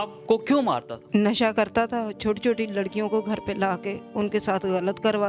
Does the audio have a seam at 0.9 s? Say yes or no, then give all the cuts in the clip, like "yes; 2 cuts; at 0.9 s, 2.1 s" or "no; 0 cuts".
yes; 1 cut; at 0.9 s